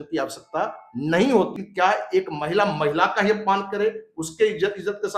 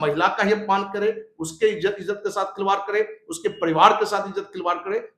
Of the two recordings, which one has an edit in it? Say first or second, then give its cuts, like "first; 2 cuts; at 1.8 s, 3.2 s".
first; 1 cut; at 1.6 s